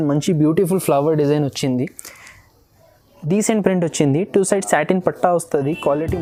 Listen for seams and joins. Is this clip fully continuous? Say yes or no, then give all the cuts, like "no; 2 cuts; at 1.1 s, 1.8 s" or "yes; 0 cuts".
yes; 0 cuts